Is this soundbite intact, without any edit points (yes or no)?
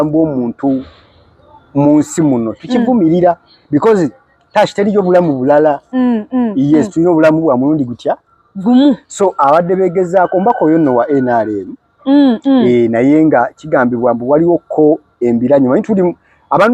yes